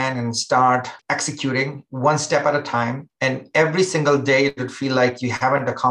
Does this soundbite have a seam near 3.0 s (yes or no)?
yes